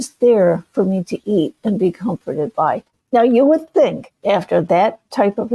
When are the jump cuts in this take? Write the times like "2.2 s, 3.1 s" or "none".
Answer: 2.9 s, 4.1 s